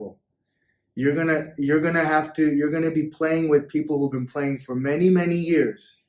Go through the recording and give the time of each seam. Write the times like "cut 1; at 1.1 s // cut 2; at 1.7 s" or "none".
none